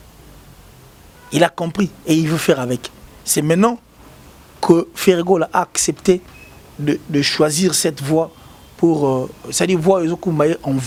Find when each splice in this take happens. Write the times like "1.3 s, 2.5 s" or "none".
none